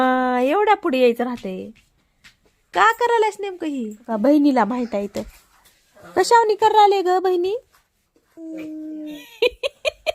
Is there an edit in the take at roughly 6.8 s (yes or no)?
no